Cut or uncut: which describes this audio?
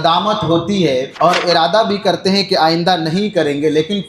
cut